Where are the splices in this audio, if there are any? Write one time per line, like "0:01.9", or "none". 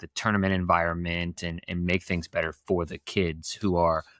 none